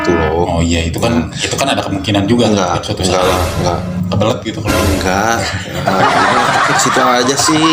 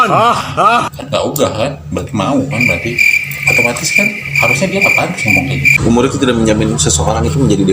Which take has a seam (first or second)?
second